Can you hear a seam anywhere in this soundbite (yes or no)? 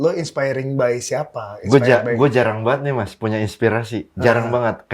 no